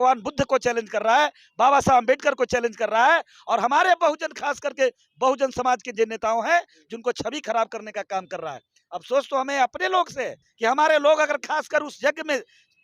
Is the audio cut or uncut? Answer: cut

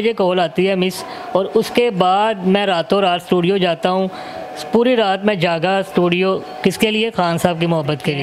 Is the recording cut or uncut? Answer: uncut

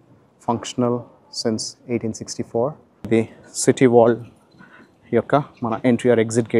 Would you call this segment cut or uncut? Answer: cut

